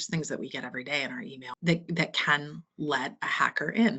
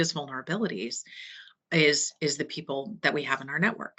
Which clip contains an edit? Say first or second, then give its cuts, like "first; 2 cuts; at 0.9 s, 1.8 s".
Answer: first; 1 cut; at 1.5 s